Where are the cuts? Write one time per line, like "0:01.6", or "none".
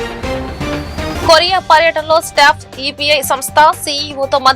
none